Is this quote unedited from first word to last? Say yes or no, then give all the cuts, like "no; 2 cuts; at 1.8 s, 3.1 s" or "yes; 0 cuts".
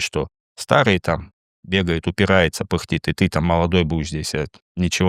yes; 0 cuts